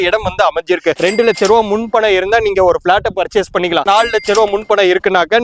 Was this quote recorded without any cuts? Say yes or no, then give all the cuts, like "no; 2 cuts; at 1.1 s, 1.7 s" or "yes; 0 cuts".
no; 2 cuts; at 1.0 s, 3.9 s